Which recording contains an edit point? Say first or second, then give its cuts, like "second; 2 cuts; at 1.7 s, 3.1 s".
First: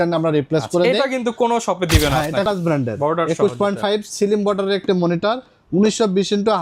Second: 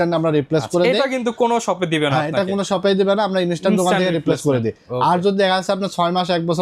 first; 1 cut; at 2.5 s